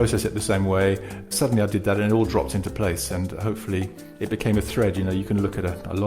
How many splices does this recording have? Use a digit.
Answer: 2